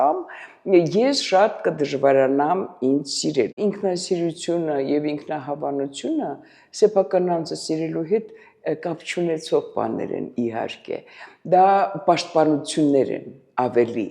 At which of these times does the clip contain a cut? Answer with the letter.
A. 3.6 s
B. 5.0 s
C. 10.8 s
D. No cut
A